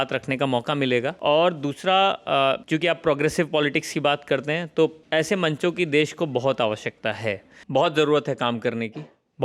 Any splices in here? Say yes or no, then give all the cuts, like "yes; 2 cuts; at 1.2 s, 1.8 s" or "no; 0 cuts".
yes; 4 cuts; at 1.1 s, 2.6 s, 5.0 s, 7.5 s